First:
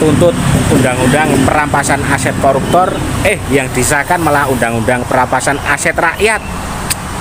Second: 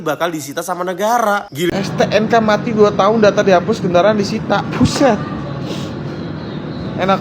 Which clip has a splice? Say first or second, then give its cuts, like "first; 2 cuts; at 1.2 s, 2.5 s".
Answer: second; 1 cut; at 1.7 s